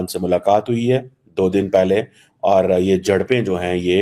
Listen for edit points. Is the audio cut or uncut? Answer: uncut